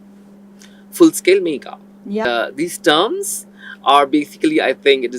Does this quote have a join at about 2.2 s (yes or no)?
yes